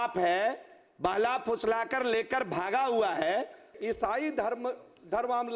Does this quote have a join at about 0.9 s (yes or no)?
no